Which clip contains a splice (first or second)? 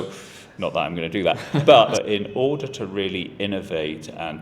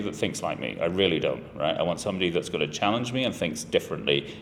first